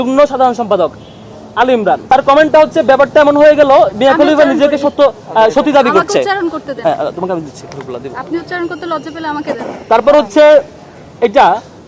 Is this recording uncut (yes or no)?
no